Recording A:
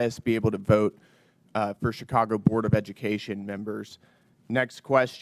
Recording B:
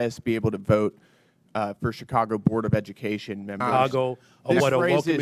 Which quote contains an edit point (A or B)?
B